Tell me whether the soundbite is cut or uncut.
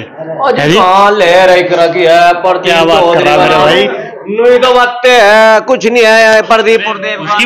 uncut